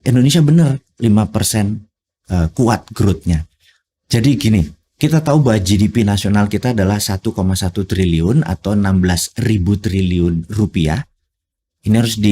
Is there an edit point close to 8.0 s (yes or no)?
no